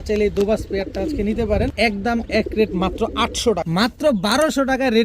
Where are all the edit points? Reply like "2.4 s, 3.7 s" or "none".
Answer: 1.7 s, 3.6 s